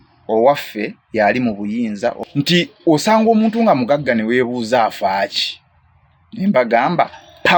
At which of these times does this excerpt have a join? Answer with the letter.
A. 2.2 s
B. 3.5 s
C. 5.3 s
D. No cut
A